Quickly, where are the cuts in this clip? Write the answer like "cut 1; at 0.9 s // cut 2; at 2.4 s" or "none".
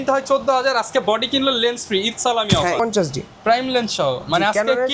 cut 1; at 2.8 s